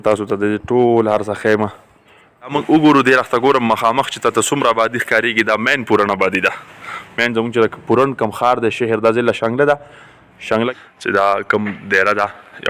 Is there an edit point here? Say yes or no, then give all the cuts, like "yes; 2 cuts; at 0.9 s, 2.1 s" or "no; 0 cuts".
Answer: yes; 2 cuts; at 2.5 s, 10.7 s